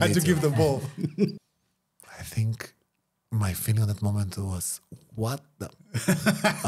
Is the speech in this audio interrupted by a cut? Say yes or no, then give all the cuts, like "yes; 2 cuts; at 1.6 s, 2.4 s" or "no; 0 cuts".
yes; 1 cut; at 1.3 s